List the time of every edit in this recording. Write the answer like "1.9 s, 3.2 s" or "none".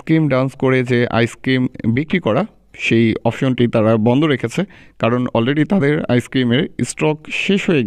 none